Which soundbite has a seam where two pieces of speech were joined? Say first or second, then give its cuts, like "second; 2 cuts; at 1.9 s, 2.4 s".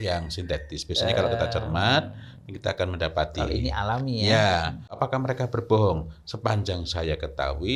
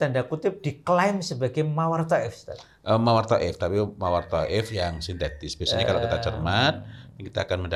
first; 1 cut; at 5.0 s